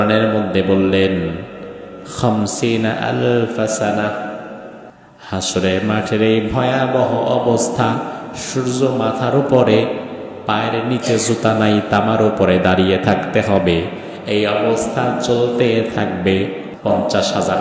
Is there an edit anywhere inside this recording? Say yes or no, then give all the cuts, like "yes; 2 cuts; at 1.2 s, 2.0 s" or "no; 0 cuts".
yes; 1 cut; at 16.7 s